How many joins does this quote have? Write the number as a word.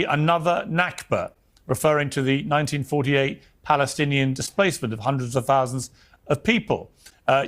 zero